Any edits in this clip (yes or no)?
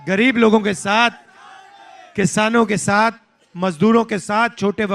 no